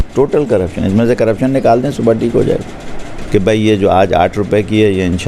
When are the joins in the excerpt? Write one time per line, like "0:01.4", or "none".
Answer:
0:03.1